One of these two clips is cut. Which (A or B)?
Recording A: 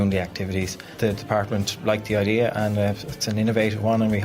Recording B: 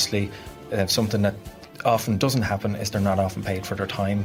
A